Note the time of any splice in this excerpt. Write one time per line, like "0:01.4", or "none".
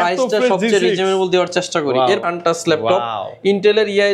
0:02.2